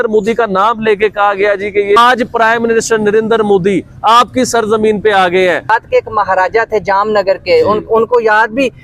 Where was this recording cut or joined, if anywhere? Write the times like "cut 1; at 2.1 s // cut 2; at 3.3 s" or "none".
cut 1; at 2.0 s // cut 2; at 5.7 s